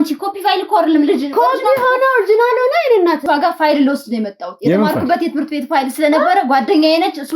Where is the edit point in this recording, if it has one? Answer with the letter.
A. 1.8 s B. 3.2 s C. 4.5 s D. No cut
B